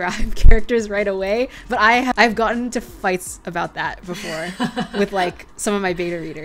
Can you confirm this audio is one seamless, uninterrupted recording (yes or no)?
no